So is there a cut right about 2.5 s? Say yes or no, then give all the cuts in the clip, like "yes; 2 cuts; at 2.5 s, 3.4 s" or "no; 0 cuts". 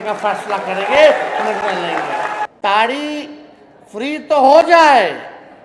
yes; 1 cut; at 2.5 s